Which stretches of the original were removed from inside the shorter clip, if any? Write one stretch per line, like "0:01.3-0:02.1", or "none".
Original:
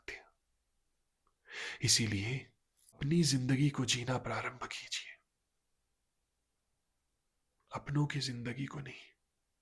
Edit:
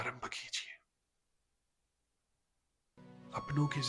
none

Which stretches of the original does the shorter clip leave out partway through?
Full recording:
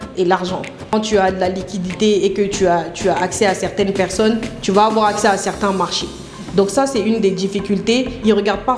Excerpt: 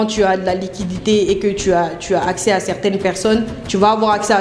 none

